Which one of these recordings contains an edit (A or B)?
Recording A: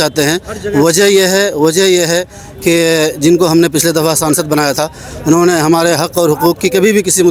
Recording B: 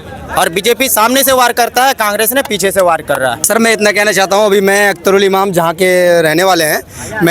B